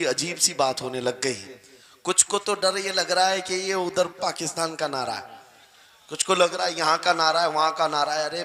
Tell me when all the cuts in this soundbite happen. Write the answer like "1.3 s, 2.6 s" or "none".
none